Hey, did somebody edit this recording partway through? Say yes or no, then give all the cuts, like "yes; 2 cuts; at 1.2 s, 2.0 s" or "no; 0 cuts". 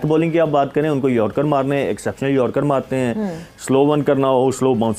no; 0 cuts